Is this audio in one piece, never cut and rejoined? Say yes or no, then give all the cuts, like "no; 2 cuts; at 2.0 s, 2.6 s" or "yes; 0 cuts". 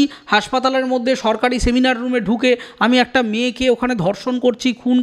yes; 0 cuts